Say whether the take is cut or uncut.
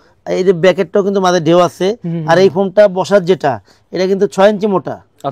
uncut